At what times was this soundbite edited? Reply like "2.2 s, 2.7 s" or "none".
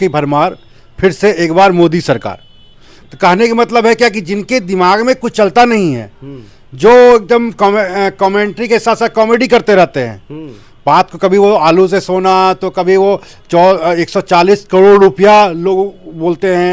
none